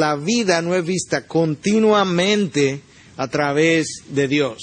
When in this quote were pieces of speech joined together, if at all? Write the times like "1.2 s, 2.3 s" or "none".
none